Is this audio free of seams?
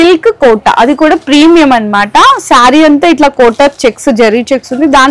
yes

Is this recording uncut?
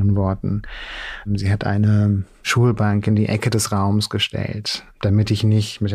no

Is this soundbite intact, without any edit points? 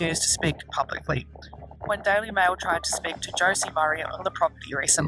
no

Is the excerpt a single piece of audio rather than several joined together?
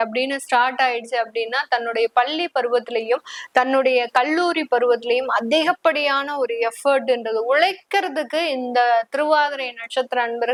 yes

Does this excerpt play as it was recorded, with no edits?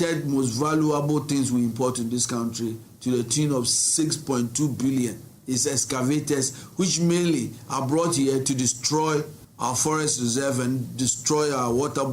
no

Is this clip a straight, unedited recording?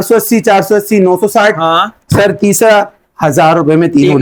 yes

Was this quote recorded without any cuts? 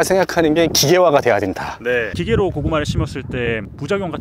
yes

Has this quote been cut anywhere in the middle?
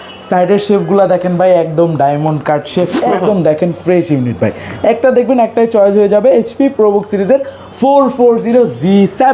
yes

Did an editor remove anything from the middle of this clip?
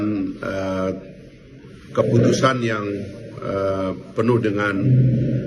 no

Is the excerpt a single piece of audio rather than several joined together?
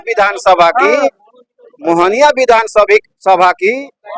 yes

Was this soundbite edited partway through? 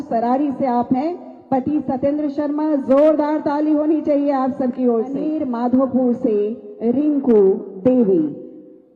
yes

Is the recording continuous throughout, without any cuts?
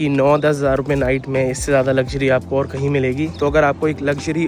no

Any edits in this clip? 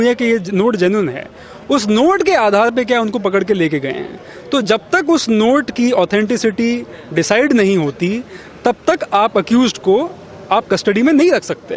no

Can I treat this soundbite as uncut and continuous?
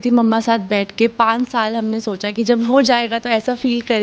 yes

